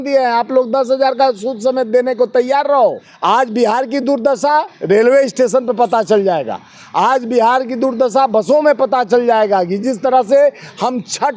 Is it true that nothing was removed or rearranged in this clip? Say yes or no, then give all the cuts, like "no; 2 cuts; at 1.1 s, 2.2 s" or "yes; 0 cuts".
no; 1 cut; at 3.1 s